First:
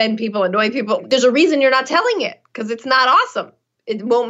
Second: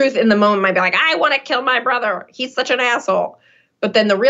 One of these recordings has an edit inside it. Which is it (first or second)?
first